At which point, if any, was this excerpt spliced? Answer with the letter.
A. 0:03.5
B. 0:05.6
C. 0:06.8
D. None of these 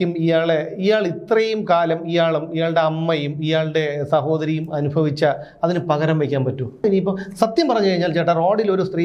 C